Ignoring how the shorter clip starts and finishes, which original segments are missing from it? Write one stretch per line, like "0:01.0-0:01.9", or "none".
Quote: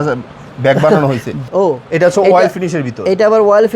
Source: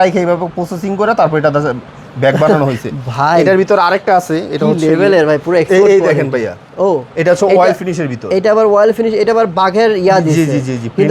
0:02.9-0:06.6